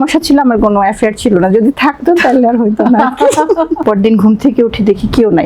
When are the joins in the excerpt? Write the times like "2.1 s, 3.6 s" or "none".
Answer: 3.8 s

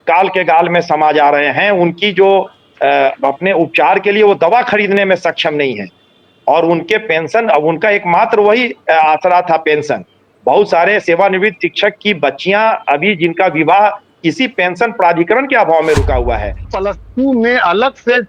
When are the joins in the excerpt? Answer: 16.7 s

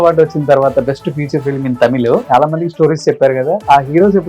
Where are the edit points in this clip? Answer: 2.2 s

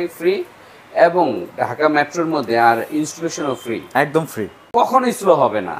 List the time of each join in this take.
4.6 s

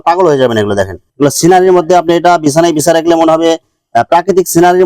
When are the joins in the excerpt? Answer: 1.0 s

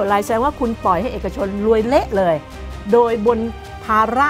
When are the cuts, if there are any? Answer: none

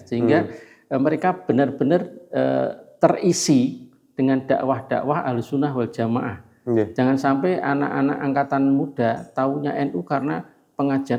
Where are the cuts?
none

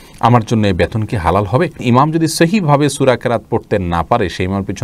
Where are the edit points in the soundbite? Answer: 1.8 s

